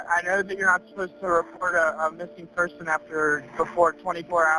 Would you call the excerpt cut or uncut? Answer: uncut